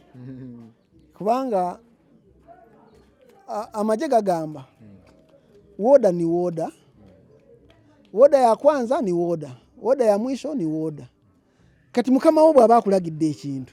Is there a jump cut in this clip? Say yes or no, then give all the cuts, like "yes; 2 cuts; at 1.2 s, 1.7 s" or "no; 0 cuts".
no; 0 cuts